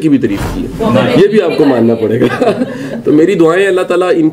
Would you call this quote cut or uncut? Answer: uncut